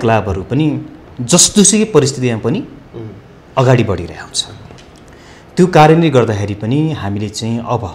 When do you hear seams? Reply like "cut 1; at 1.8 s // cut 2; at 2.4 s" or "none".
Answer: none